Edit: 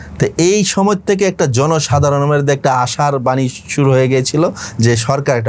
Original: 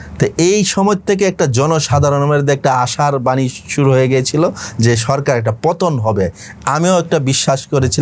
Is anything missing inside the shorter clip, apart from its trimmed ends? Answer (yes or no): no